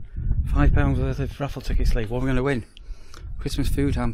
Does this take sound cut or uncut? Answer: uncut